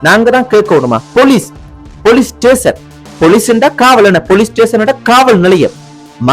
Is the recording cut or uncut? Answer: cut